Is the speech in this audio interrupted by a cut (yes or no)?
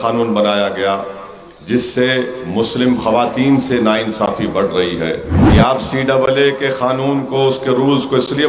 yes